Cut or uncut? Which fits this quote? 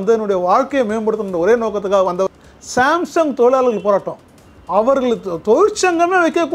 cut